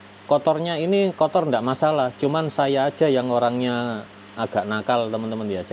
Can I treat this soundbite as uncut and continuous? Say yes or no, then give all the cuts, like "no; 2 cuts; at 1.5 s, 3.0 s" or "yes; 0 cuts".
yes; 0 cuts